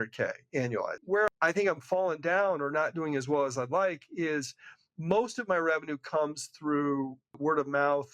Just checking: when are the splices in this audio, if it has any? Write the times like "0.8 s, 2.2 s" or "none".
1.0 s